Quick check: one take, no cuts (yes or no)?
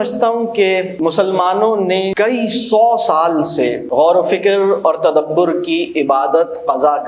no